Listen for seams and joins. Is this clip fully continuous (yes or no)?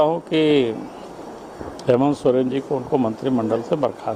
yes